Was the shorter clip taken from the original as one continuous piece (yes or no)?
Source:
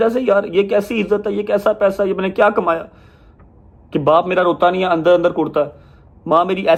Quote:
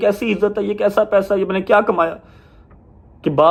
yes